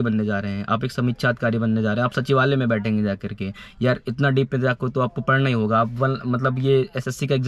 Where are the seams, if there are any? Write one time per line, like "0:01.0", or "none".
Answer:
none